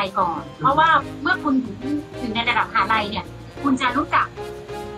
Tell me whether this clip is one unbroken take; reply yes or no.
yes